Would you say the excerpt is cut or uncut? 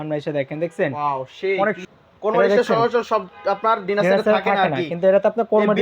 cut